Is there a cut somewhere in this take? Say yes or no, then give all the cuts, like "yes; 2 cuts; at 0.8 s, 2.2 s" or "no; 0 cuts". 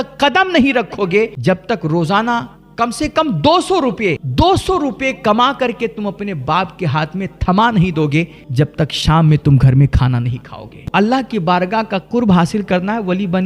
yes; 4 cuts; at 1.4 s, 4.2 s, 8.4 s, 10.8 s